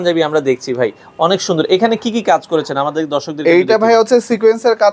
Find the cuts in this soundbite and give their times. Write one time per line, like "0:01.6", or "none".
none